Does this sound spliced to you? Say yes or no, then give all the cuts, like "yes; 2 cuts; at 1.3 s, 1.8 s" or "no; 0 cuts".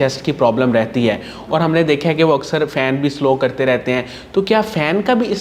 no; 0 cuts